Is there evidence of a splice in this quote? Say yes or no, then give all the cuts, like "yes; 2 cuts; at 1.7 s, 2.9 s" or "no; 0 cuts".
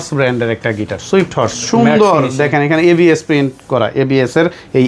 no; 0 cuts